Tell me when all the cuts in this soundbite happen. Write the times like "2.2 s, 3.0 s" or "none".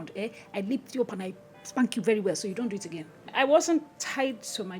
3.3 s